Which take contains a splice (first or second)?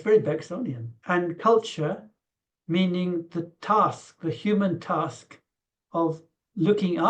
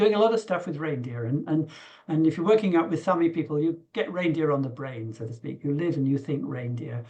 first